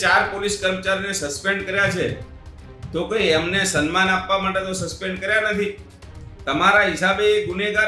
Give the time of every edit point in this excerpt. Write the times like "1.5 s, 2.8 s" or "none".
none